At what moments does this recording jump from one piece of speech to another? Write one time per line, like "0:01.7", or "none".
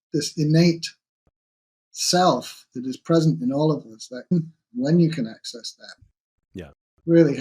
0:04.3